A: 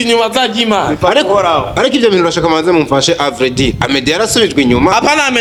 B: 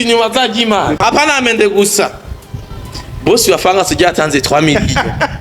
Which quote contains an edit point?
B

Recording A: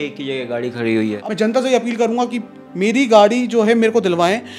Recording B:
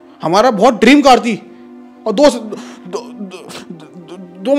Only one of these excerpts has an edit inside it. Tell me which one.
A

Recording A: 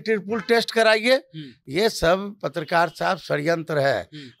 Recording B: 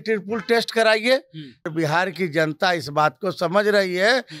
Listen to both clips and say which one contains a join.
B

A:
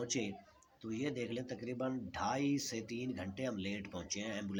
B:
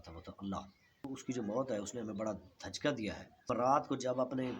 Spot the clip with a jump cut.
B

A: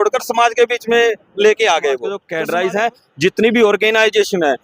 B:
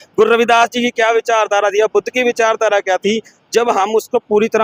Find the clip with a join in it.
A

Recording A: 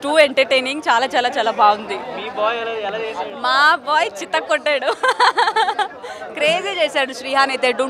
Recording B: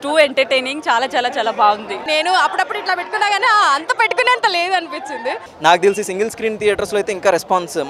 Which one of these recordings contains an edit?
B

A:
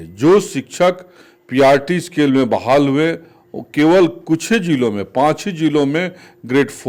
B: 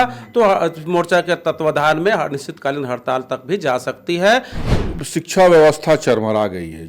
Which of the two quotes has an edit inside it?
B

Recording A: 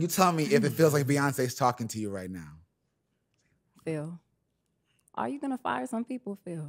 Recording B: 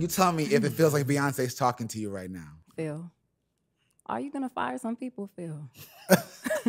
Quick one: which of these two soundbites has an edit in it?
B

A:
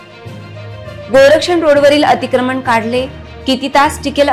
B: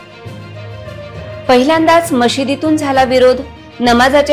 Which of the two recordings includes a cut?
B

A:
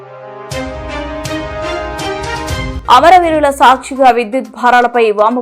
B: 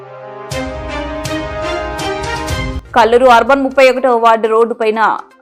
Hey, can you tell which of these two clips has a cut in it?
A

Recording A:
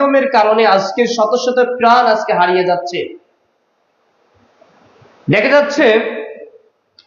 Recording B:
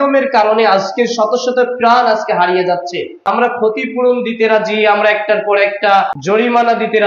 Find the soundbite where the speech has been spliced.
B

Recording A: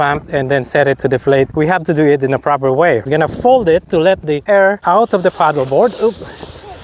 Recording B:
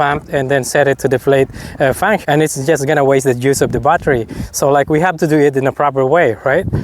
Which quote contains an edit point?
A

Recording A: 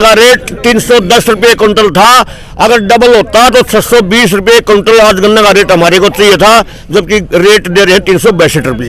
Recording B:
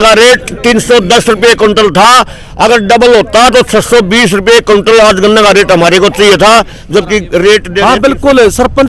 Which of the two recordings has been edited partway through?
B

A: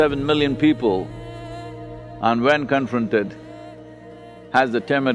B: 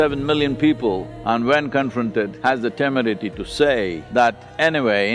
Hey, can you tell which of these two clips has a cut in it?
B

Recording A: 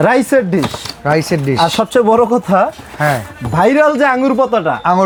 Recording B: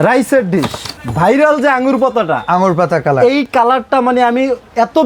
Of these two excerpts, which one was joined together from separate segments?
B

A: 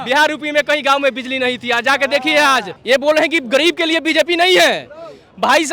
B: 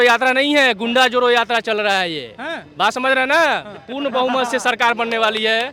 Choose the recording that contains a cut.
A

